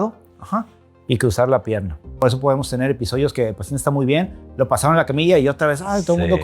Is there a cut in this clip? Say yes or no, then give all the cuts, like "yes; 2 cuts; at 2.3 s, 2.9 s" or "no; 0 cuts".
yes; 1 cut; at 2.1 s